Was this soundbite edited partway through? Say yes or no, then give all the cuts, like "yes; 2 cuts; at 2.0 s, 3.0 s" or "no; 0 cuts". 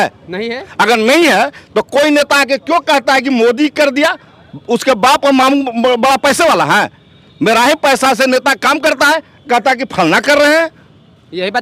no; 0 cuts